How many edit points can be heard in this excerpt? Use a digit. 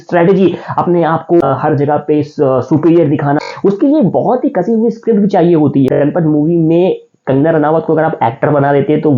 2